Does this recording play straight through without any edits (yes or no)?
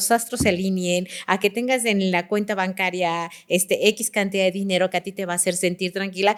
yes